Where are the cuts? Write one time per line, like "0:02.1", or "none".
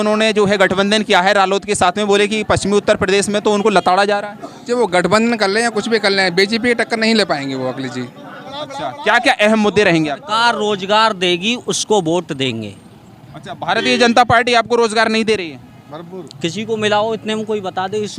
0:08.6